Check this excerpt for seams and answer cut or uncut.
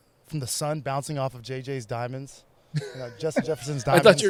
uncut